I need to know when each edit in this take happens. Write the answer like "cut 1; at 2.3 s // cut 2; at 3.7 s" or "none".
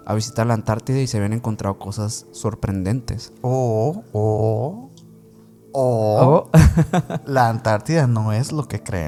none